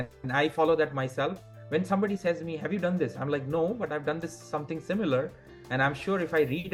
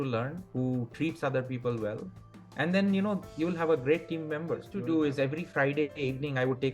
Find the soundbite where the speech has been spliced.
second; 1 cut; at 4.7 s

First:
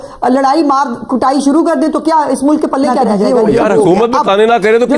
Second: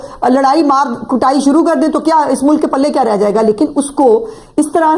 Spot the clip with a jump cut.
first; 1 cut; at 3.2 s

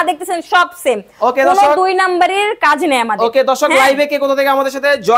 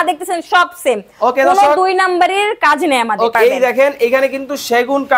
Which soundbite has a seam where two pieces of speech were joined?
second; 1 cut; at 3.3 s

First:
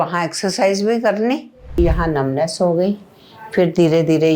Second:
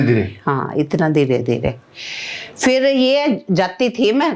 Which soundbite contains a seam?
first; 1 cut; at 1.8 s

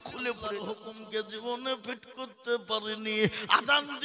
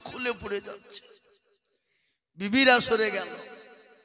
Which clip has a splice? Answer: first; 1 cut; at 0.9 s

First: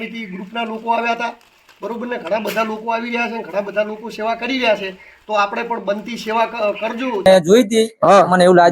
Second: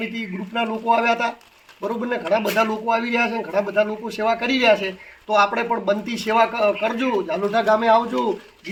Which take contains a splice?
first; 1 cut; at 7.3 s

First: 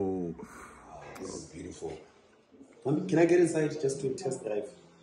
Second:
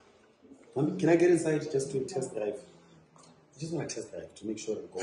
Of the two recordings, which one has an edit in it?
first; 1 cut; at 1.2 s

